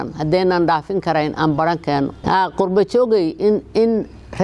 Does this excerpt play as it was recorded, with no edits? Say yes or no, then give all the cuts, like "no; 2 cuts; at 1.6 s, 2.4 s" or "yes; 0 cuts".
no; 1 cut; at 2.2 s